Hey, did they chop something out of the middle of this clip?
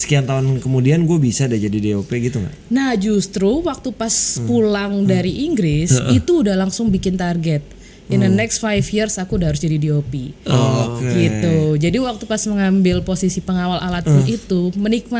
no; 0 cuts

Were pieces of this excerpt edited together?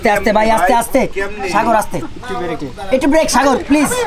no; 0 cuts

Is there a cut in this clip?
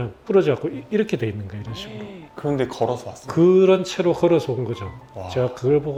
no; 0 cuts

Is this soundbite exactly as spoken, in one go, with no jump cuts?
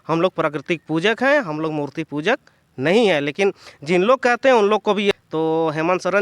no; 1 cut; at 5.2 s

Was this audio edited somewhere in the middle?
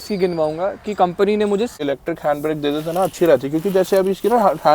yes; 1 cut; at 1.8 s

